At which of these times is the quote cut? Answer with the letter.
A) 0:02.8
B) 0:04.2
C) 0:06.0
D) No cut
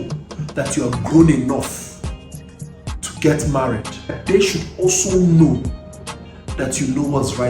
B